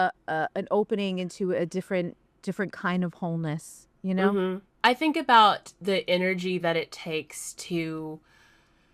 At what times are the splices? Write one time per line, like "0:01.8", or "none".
0:02.3
0:04.4